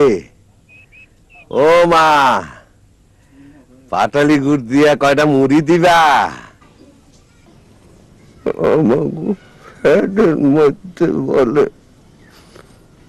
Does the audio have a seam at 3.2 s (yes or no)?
no